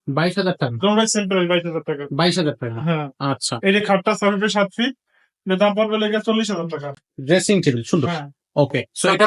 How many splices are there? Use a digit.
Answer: 1